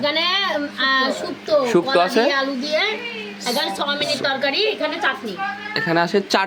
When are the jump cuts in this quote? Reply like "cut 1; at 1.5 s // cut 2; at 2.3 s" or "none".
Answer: none